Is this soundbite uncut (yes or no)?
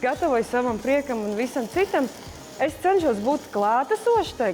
yes